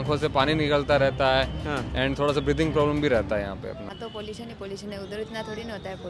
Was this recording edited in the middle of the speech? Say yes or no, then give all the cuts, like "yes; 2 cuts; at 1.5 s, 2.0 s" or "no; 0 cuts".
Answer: yes; 1 cut; at 3.9 s